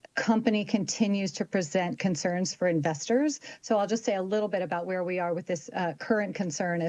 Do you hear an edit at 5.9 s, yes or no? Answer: no